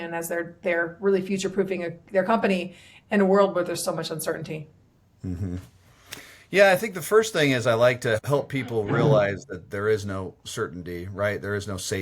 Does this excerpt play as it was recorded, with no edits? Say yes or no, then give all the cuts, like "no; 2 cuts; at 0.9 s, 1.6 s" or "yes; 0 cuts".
no; 1 cut; at 8.2 s